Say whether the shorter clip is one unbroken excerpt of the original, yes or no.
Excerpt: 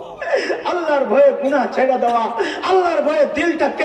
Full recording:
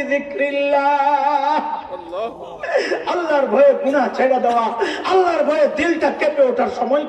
yes